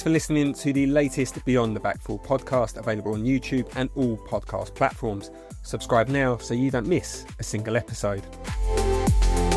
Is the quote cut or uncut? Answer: uncut